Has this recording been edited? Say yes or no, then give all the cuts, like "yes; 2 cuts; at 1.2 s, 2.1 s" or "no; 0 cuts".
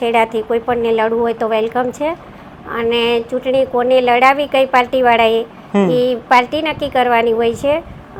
no; 0 cuts